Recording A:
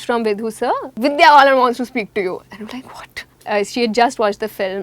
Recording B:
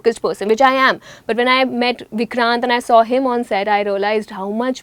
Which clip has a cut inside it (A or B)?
A